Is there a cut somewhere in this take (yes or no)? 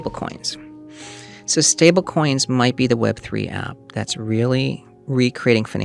no